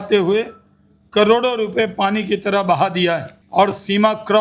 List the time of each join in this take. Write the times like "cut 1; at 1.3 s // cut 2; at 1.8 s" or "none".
cut 1; at 3.4 s